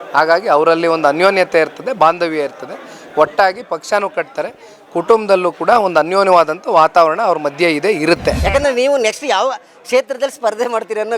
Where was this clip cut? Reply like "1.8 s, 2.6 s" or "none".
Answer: 8.4 s